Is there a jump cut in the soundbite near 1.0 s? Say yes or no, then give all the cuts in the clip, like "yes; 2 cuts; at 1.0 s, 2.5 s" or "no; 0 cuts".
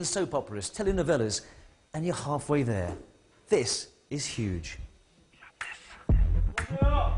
no; 0 cuts